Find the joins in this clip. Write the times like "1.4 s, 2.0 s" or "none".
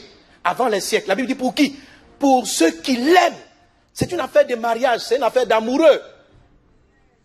none